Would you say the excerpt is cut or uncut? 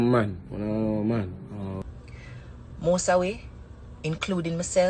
cut